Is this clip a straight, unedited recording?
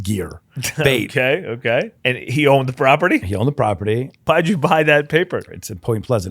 no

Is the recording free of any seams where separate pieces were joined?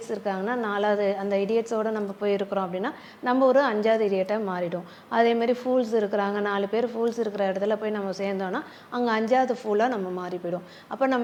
yes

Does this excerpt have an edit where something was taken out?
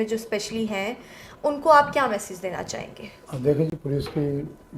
no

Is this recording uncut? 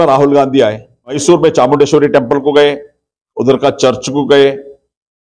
no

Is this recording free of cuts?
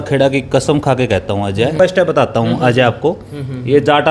no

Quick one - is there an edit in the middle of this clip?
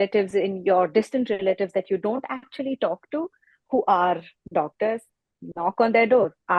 no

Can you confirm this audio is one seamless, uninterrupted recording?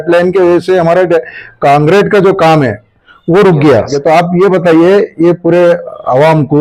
no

